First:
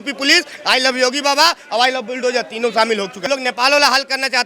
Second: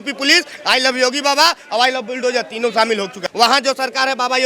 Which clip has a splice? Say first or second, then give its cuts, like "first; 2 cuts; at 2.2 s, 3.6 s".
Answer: second; 1 cut; at 3.2 s